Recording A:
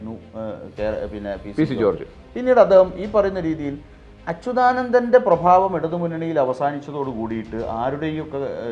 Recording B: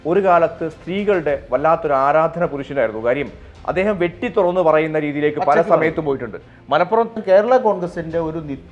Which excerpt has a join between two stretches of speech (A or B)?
B